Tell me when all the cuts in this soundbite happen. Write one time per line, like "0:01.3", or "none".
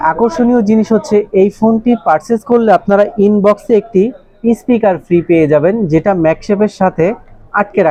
none